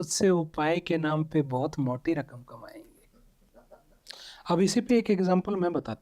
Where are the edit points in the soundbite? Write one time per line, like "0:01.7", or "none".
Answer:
0:03.3